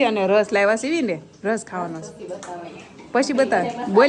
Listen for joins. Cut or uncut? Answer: uncut